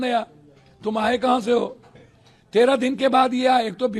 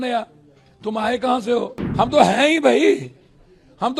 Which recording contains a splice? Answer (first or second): second